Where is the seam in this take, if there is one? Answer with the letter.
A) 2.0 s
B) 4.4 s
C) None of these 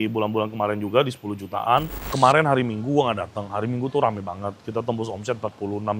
A